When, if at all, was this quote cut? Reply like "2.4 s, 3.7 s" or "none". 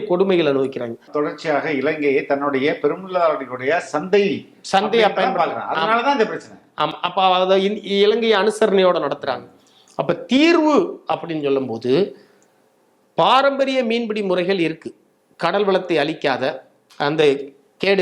1.1 s